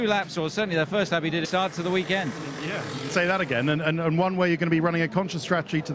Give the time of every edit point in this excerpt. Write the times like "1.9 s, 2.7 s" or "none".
none